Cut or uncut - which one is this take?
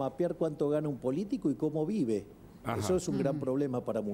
uncut